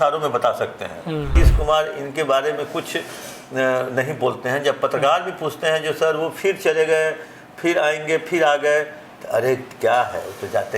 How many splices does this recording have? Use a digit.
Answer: 1